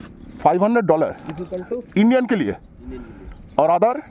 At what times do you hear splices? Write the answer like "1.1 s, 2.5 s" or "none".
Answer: none